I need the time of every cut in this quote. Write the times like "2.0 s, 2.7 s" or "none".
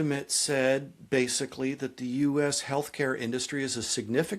none